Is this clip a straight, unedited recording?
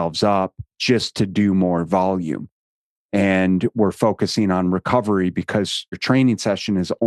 no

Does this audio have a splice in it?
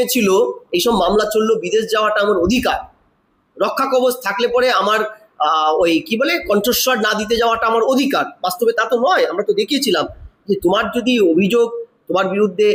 no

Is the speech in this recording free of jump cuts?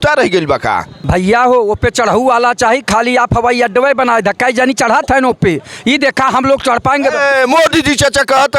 no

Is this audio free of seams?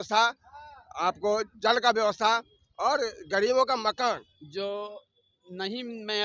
no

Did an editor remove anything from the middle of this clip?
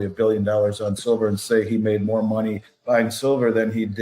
yes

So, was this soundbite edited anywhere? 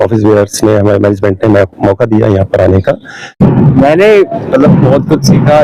yes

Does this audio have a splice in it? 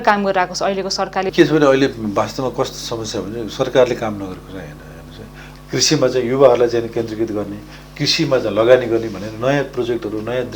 yes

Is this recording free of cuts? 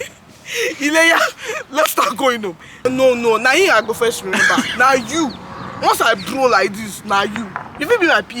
no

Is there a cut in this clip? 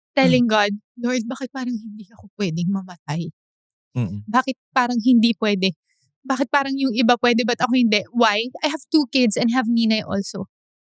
no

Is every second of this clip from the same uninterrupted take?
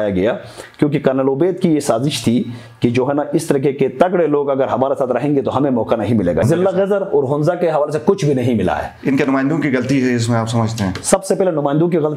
no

